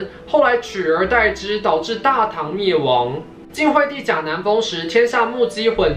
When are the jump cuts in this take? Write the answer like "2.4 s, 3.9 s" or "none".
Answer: none